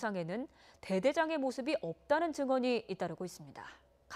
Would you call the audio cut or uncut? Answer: uncut